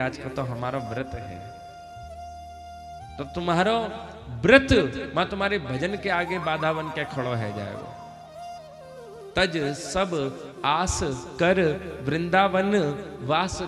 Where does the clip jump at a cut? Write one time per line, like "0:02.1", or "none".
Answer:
none